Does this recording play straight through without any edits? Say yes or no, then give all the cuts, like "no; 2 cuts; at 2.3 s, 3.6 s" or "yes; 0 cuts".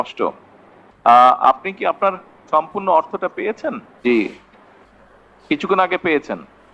no; 1 cut; at 3.9 s